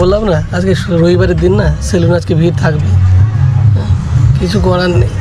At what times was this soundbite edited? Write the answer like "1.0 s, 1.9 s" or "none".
none